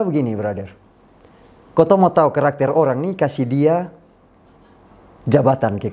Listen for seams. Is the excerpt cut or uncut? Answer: uncut